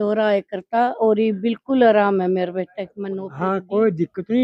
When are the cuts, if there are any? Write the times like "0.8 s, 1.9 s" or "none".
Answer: 3.3 s